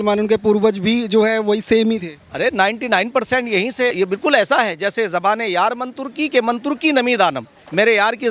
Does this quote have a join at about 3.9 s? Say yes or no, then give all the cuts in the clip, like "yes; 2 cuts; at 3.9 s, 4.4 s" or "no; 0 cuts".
yes; 1 cut; at 3.9 s